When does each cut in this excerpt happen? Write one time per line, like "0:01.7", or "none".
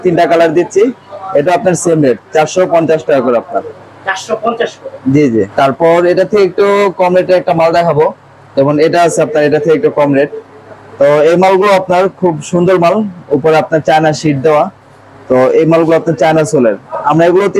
none